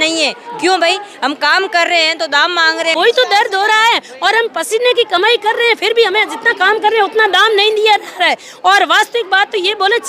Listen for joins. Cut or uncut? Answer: cut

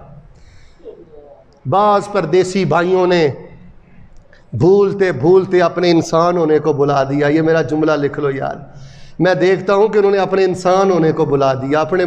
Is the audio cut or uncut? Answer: uncut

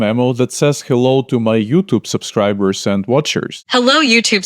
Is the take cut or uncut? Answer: cut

